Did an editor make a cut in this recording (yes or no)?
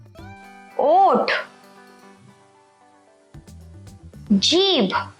yes